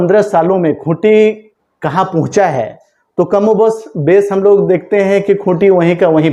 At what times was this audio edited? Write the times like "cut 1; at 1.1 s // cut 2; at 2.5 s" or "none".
none